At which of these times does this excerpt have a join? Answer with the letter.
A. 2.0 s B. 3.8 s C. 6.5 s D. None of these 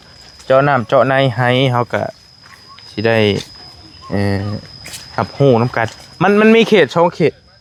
D